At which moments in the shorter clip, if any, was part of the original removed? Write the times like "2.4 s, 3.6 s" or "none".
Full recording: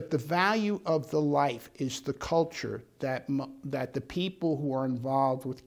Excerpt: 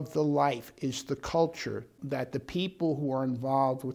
1.9 s